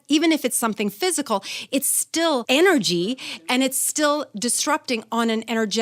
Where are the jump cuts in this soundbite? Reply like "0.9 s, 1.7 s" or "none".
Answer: 2.4 s